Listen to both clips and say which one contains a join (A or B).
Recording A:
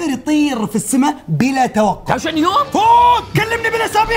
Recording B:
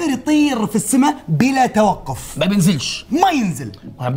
A